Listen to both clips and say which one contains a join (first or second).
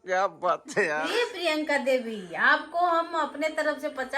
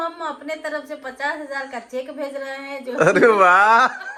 first